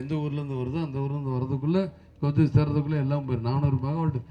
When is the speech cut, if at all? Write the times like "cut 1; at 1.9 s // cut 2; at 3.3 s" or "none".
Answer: none